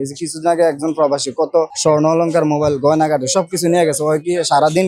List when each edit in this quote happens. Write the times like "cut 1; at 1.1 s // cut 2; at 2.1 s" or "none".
none